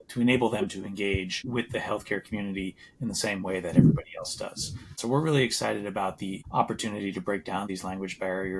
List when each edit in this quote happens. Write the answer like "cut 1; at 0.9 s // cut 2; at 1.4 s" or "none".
cut 1; at 4.9 s // cut 2; at 6.4 s // cut 3; at 7.7 s